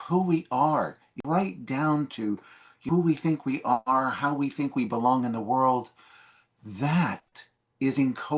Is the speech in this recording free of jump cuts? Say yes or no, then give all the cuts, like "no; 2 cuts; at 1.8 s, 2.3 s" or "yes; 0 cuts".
no; 2 cuts; at 1.2 s, 2.8 s